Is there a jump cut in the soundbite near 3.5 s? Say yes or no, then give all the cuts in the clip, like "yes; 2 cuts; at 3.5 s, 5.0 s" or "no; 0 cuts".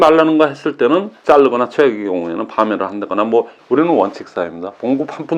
yes; 2 cuts; at 1.1 s, 3.5 s